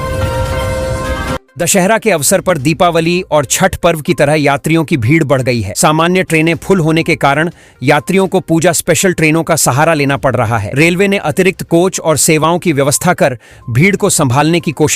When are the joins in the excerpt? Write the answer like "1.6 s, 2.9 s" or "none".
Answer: 1.4 s